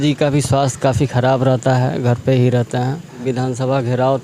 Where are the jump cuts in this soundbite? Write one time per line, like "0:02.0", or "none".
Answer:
0:03.2